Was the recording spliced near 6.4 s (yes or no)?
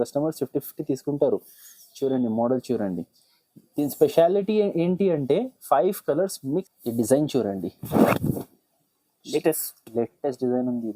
yes